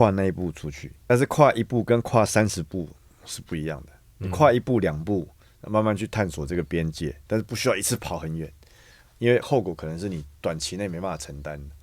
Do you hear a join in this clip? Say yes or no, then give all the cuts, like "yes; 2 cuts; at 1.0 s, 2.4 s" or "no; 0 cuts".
yes; 1 cut; at 1.0 s